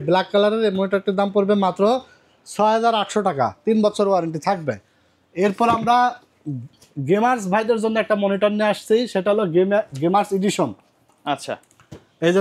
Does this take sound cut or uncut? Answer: uncut